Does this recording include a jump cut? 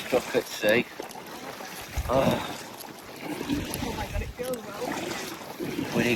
no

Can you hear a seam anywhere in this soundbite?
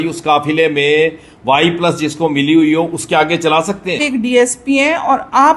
yes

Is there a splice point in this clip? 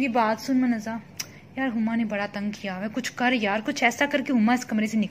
no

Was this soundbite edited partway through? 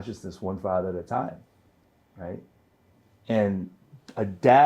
no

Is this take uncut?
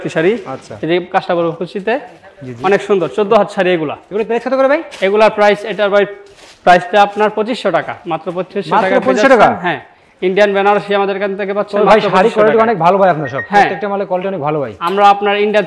yes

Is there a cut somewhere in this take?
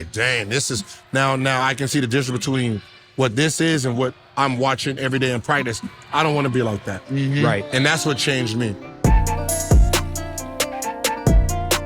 yes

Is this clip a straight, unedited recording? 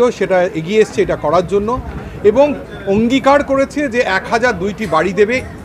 yes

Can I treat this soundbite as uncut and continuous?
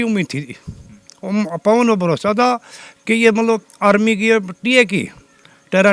yes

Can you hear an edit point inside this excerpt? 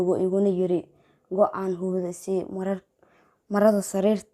no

